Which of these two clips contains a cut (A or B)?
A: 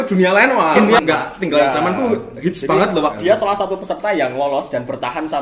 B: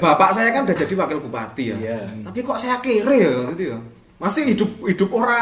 A